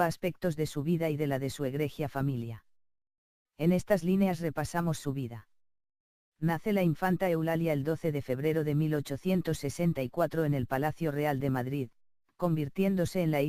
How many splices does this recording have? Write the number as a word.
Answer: zero